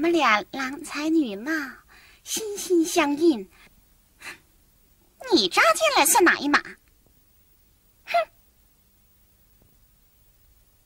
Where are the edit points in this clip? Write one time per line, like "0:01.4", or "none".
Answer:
none